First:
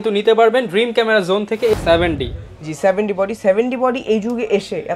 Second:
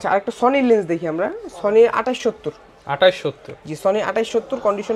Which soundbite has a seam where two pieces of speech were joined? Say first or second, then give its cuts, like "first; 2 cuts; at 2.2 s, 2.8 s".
first; 1 cut; at 1.7 s